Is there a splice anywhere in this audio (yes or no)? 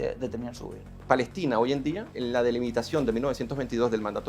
yes